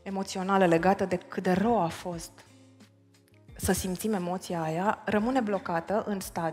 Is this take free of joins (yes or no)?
yes